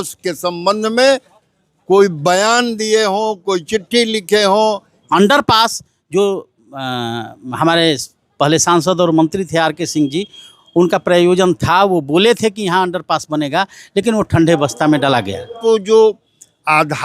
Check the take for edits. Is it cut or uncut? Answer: cut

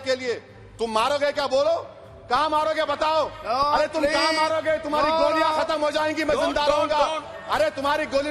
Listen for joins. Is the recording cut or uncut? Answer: uncut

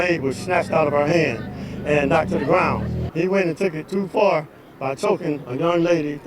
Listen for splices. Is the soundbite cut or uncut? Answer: cut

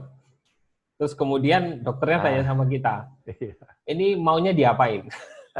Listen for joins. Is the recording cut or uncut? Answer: uncut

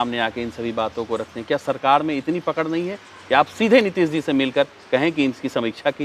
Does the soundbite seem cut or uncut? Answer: uncut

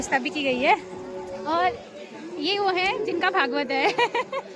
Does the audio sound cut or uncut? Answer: uncut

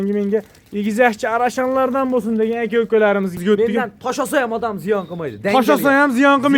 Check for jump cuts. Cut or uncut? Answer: cut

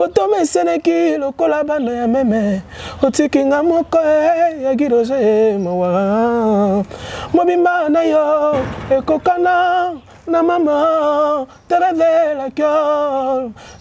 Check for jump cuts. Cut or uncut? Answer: uncut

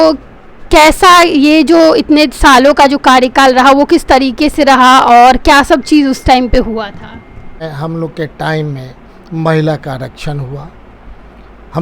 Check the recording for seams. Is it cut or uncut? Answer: cut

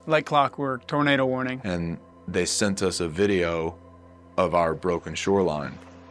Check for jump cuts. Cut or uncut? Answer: cut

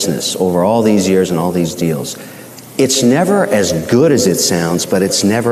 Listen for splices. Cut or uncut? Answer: uncut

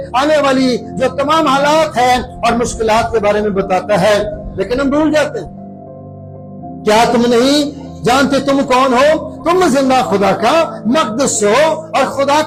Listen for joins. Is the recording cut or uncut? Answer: uncut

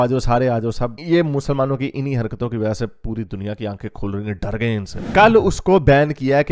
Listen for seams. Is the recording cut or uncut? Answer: cut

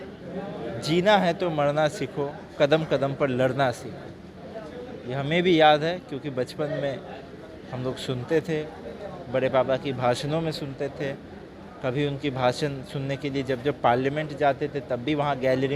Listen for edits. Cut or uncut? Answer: uncut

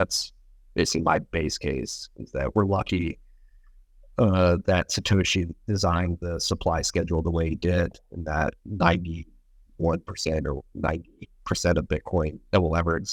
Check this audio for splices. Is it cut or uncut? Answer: uncut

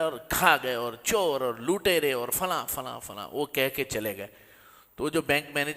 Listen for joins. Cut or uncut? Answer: uncut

